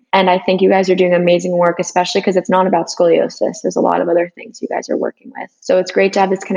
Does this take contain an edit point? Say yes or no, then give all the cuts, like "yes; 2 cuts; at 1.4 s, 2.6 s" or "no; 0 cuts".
no; 0 cuts